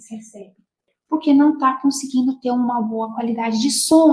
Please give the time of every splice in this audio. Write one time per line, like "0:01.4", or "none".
0:00.9